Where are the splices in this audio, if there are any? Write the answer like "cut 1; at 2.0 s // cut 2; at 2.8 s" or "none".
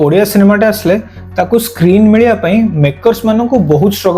none